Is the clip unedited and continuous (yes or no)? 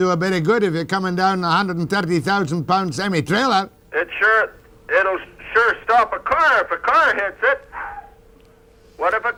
yes